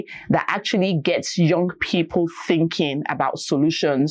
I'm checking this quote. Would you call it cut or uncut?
uncut